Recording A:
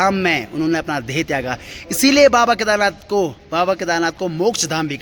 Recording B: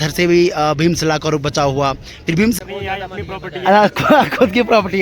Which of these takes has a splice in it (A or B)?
B